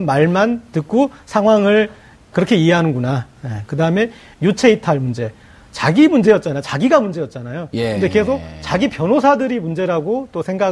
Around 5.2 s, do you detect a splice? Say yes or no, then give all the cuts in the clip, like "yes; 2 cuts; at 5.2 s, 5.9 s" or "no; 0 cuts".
no; 1 cut; at 1.0 s